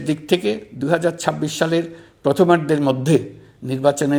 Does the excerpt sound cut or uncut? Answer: uncut